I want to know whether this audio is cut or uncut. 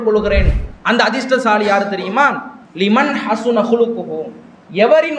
uncut